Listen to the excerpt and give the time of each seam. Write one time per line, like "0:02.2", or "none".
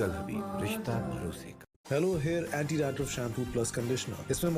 0:01.0